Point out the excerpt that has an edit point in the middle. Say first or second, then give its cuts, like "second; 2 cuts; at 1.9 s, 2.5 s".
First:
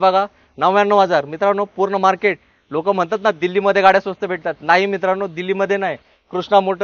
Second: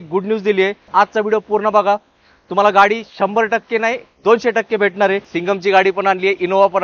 second; 2 cuts; at 0.8 s, 5.3 s